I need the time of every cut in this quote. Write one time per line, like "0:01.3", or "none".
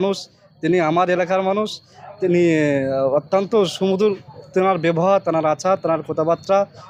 none